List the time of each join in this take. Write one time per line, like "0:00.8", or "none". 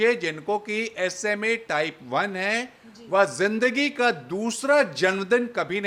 none